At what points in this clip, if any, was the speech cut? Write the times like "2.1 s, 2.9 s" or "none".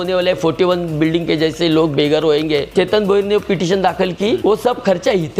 2.7 s, 4.4 s